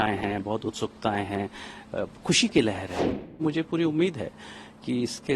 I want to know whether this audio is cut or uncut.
cut